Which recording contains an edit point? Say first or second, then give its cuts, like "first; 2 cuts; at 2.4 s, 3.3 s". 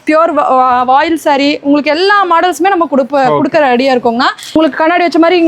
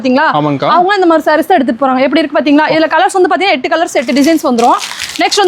first; 1 cut; at 4.6 s